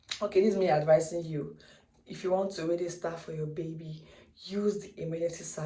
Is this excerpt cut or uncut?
uncut